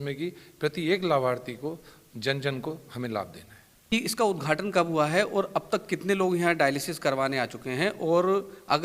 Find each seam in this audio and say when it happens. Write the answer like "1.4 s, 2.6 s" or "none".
3.9 s